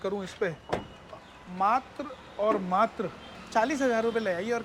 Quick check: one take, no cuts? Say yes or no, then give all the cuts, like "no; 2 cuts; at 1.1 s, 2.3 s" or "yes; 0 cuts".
yes; 0 cuts